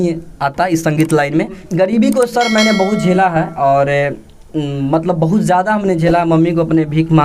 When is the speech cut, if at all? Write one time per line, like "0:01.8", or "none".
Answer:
0:01.6